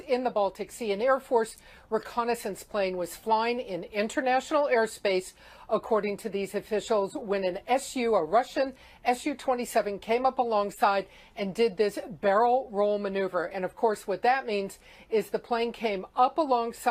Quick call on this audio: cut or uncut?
cut